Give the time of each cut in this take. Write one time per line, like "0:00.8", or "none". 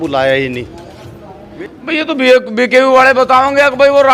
0:01.4